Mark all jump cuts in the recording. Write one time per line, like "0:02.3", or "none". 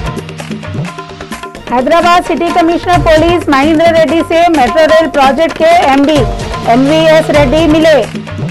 0:01.5